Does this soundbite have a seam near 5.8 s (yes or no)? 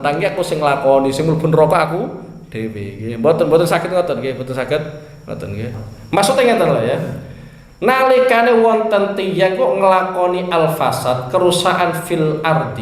yes